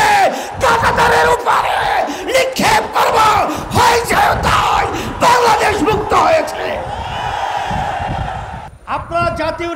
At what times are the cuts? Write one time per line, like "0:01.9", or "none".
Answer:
0:08.6